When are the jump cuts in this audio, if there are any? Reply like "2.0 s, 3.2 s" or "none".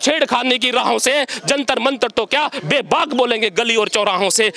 none